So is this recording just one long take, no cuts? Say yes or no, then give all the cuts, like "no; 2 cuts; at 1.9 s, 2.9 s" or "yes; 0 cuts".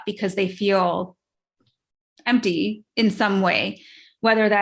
yes; 0 cuts